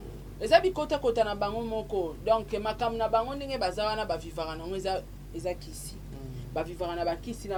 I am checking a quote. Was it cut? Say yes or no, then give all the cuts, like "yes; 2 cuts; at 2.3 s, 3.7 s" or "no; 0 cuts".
no; 0 cuts